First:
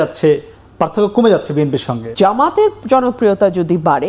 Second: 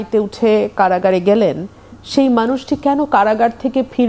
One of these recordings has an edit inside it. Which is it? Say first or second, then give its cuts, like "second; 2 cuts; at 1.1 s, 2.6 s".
first; 1 cut; at 2.0 s